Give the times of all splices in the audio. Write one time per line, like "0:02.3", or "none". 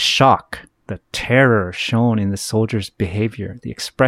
none